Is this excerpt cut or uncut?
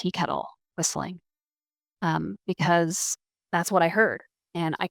uncut